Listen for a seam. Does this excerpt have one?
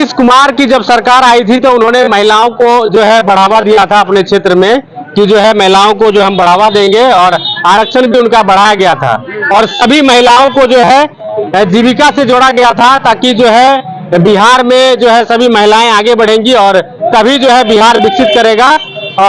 no; 0 cuts

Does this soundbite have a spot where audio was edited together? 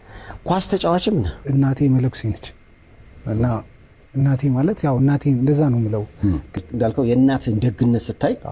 yes; 2 cuts; at 1.5 s, 6.6 s

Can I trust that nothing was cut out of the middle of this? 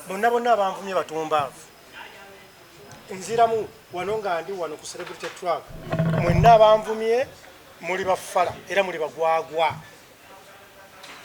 yes; 0 cuts

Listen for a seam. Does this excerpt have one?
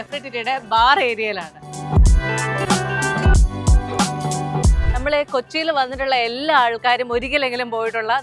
yes; 2 cuts; at 1.7 s, 4.8 s

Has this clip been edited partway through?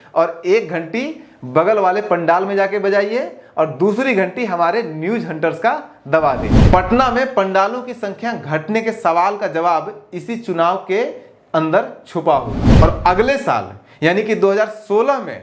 yes; 2 cuts; at 6.6 s, 12.6 s

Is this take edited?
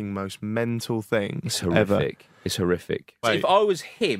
yes; 1 cut; at 3.3 s

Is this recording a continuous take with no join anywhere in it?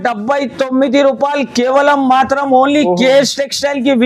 yes; 0 cuts

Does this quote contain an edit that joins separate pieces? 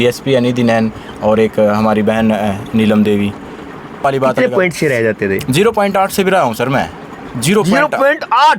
yes; 1 cut; at 4.0 s

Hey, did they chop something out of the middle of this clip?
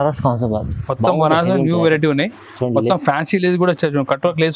no; 0 cuts

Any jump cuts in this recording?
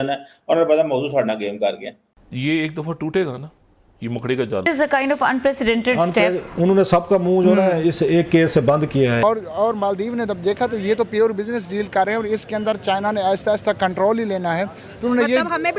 yes; 2 cuts; at 4.6 s, 9.2 s

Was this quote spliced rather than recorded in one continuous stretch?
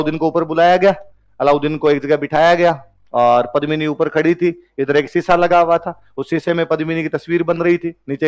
no; 0 cuts

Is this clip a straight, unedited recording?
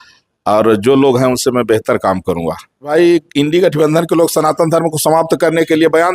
no; 1 cut; at 2.9 s

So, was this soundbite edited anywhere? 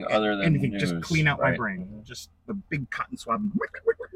no; 0 cuts

